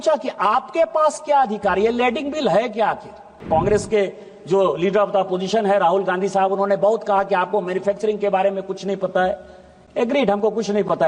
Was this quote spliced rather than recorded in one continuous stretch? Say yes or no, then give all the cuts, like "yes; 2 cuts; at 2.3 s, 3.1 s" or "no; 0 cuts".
yes; 1 cut; at 3.3 s